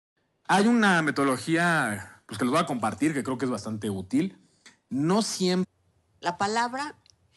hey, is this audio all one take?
yes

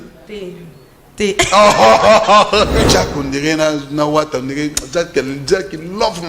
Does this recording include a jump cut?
yes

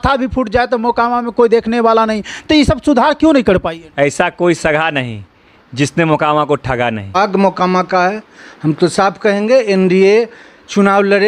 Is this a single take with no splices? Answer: no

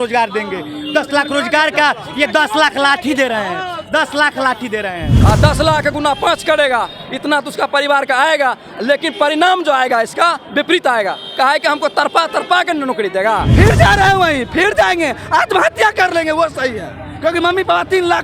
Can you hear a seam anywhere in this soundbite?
yes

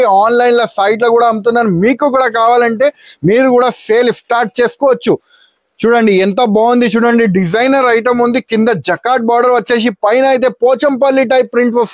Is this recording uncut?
yes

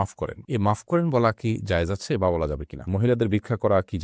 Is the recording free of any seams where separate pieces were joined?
no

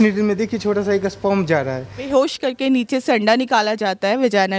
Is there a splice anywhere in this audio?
yes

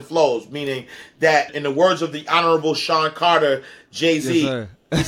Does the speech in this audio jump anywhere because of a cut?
yes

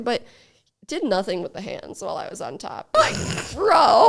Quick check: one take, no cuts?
no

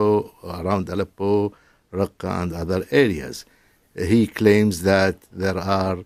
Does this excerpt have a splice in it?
no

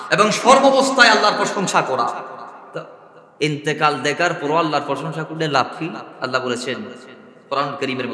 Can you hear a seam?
no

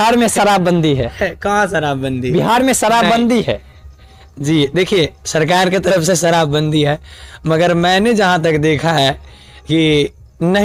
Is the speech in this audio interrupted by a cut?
no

